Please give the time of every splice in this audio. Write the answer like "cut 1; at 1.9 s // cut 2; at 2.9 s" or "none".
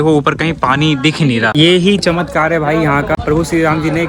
cut 1; at 1.5 s // cut 2; at 3.2 s